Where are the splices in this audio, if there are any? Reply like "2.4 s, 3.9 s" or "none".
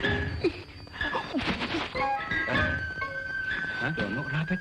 2.2 s